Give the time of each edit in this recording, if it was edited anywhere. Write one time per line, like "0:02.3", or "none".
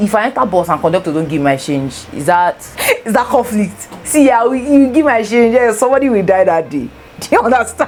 none